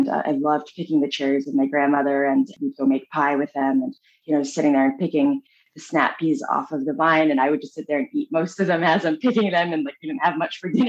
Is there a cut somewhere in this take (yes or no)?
yes